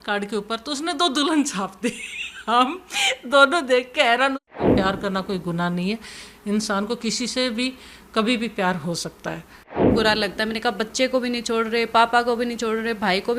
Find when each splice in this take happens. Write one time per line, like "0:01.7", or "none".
0:04.6
0:09.9